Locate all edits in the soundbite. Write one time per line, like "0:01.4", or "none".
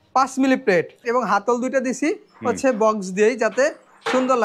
0:01.0